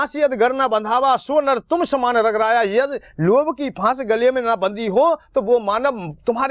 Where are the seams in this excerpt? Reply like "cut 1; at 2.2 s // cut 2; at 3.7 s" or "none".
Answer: none